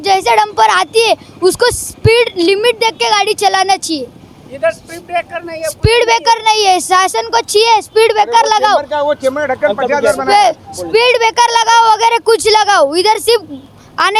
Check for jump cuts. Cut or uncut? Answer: uncut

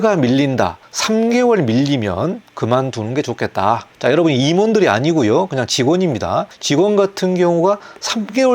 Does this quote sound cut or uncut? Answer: uncut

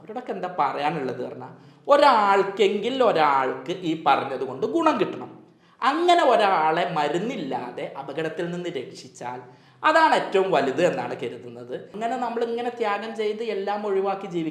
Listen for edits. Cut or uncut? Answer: cut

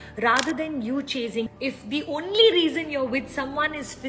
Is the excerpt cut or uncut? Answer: cut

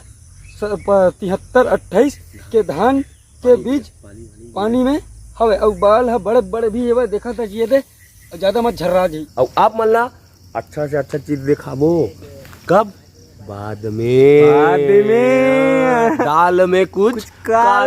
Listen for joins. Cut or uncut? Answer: cut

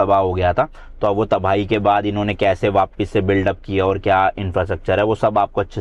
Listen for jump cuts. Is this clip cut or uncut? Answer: uncut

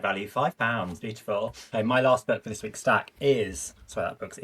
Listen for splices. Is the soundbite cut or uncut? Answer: cut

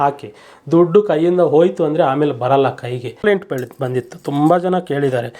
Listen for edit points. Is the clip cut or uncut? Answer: cut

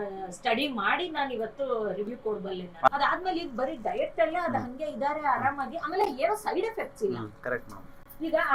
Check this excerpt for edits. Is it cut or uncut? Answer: cut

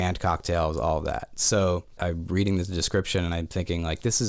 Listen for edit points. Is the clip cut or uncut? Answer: cut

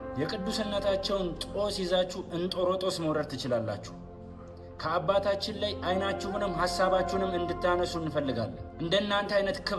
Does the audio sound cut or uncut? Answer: uncut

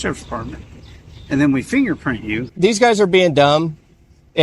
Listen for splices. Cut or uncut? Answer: cut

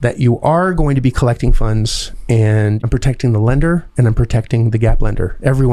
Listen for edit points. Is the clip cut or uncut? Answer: cut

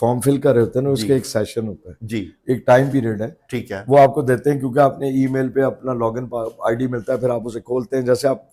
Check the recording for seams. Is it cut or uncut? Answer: uncut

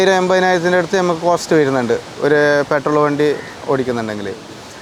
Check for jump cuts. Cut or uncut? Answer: uncut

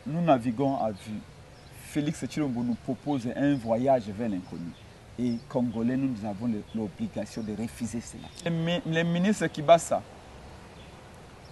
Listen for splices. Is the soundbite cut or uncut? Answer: cut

